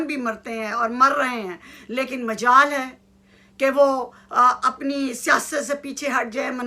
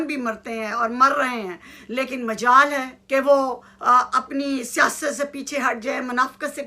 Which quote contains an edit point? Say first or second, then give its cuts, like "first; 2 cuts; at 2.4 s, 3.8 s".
second; 1 cut; at 2.9 s